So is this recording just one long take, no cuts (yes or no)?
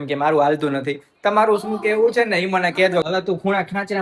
no